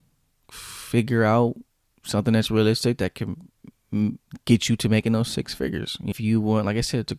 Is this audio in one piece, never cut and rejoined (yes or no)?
no